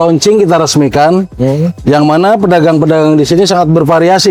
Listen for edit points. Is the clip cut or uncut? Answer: uncut